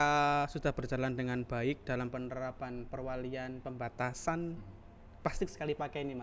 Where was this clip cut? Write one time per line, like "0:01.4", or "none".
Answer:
none